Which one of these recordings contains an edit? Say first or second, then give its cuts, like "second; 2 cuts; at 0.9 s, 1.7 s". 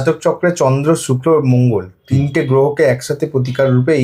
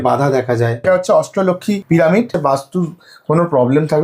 second; 3 cuts; at 0.9 s, 1.8 s, 2.3 s